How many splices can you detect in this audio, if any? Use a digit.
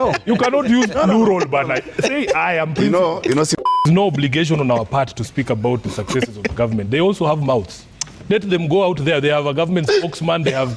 1